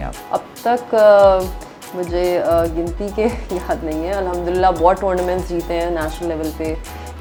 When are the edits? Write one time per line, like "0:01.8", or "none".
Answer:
none

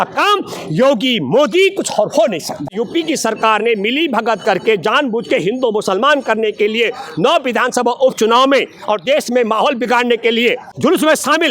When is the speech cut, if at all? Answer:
0:02.7
0:10.7

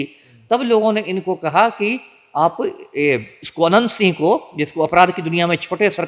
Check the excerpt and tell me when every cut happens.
none

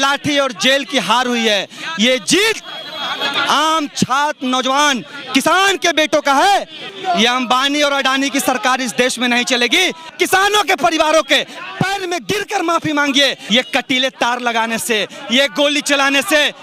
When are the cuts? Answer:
0:06.9
0:10.1
0:13.4

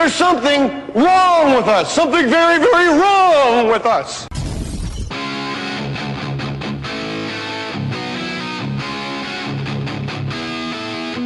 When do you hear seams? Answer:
0:01.0

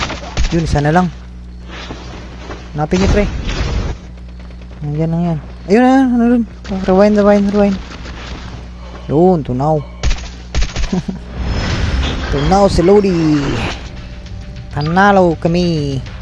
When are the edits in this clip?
none

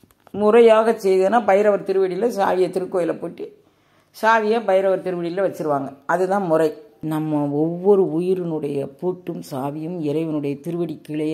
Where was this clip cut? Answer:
0:06.9

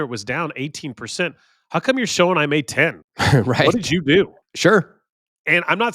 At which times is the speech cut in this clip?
0:03.1
0:04.4

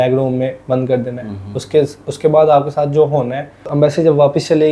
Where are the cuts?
0:03.7

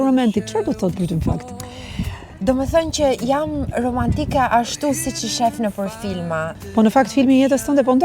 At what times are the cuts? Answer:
0:06.5

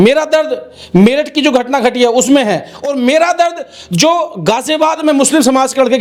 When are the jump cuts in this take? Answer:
none

